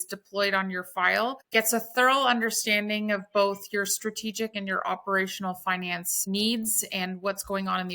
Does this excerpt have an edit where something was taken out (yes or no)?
yes